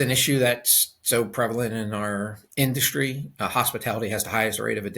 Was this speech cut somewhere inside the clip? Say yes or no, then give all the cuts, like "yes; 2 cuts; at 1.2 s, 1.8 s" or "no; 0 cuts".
no; 0 cuts